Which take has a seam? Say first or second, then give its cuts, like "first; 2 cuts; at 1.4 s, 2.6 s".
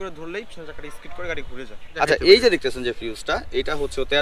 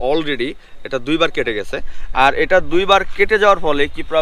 first; 1 cut; at 1.9 s